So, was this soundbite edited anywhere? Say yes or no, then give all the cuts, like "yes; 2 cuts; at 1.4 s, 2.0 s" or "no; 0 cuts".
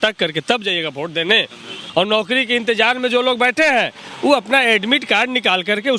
yes; 1 cut; at 1.8 s